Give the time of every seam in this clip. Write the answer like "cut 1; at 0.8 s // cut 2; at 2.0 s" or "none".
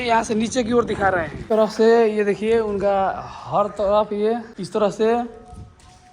cut 1; at 1.4 s // cut 2; at 4.5 s